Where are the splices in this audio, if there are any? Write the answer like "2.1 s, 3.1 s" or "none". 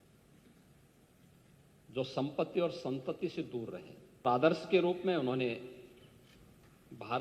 4.2 s